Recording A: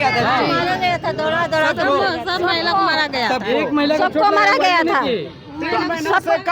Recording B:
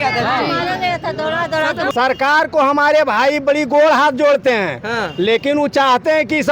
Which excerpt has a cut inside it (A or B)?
B